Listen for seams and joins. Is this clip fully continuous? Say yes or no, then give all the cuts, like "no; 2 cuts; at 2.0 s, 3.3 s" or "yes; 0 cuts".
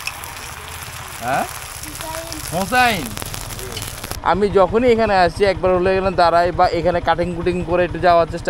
no; 1 cut; at 4.1 s